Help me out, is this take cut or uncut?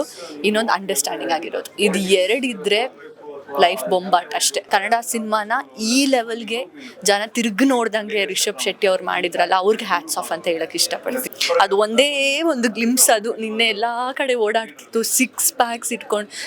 cut